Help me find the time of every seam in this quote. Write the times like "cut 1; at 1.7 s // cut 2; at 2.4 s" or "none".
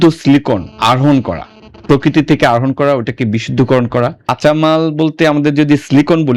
cut 1; at 4.4 s